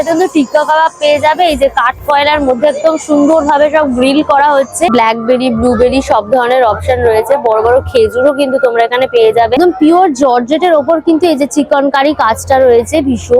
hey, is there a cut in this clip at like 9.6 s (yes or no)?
yes